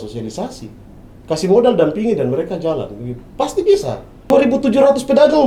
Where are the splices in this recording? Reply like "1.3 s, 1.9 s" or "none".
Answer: 4.3 s